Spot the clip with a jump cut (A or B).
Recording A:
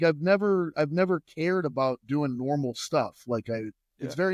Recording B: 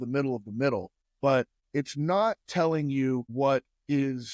B